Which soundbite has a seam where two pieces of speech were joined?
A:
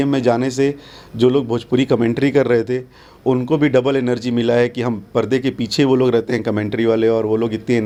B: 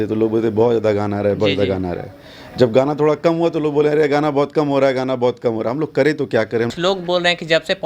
B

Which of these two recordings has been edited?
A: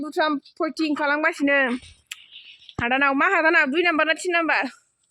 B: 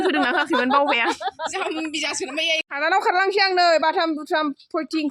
B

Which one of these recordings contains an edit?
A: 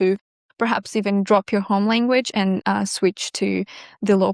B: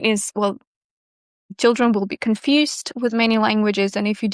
B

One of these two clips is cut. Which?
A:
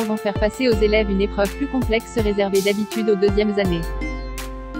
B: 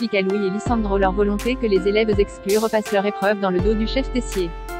A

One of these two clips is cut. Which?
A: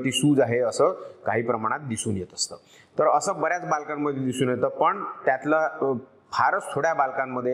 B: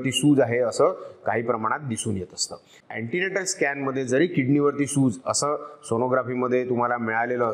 B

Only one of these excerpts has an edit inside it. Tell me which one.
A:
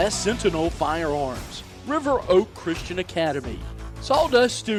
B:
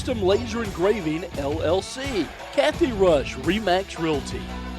B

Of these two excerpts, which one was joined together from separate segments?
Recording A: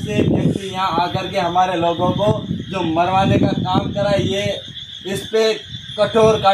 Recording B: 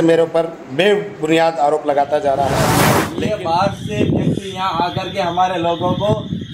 B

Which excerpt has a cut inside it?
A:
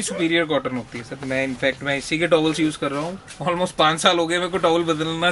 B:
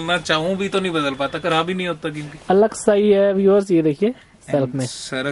B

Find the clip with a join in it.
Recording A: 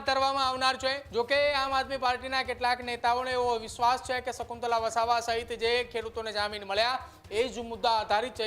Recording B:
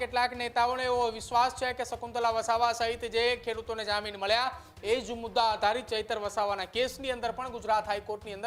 A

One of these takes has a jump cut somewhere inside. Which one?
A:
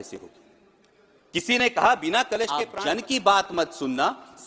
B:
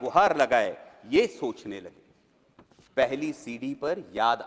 A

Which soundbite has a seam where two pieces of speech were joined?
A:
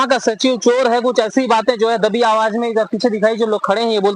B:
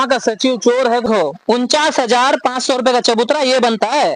B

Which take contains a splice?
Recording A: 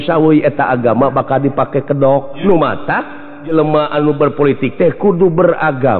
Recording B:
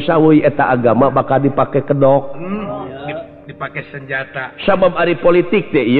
A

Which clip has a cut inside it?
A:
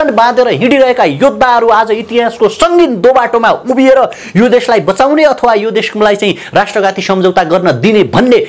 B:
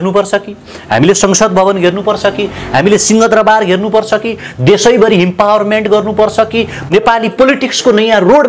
B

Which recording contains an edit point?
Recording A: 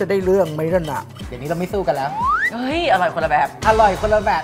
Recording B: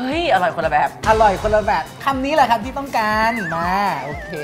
A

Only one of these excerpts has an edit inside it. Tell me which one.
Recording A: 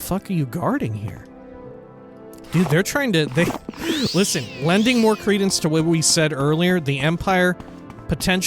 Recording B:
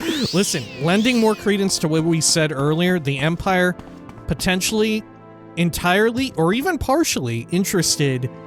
A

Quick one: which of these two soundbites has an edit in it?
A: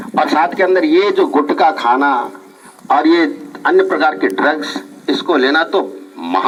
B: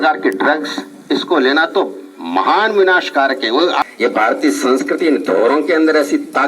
B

